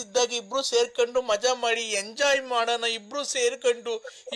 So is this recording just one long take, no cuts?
yes; 0 cuts

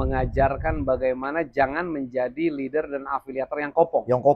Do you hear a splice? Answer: no; 0 cuts

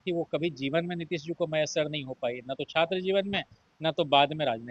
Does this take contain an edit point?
no; 0 cuts

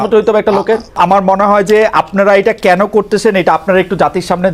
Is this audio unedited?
no; 1 cut; at 1.0 s

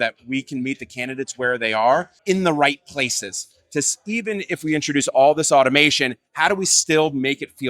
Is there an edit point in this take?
yes; 1 cut; at 2.1 s

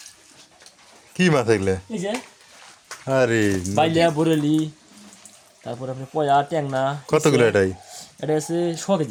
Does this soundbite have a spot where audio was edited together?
no; 0 cuts

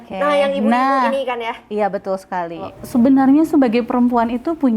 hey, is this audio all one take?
no; 1 cut; at 2.8 s

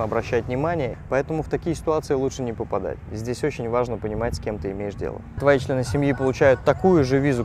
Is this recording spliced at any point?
yes; 2 cuts; at 1.0 s, 5.4 s

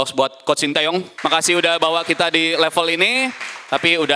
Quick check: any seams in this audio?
yes; 1 cut; at 1.1 s

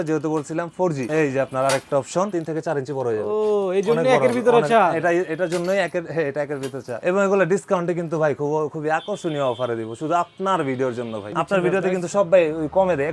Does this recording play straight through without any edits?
no; 4 cuts; at 1.0 s, 2.3 s, 7.0 s, 11.3 s

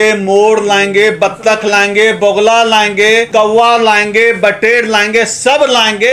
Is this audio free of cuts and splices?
no; 1 cut; at 3.3 s

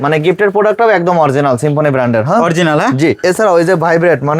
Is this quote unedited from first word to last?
no; 1 cut; at 3.2 s

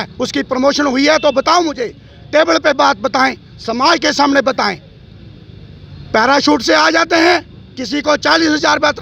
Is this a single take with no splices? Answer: yes; 0 cuts

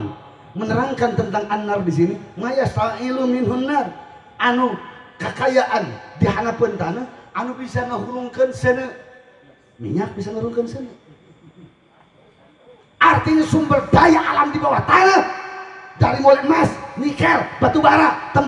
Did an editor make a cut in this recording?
no; 0 cuts

